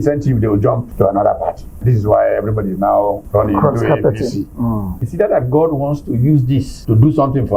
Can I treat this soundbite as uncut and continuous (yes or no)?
no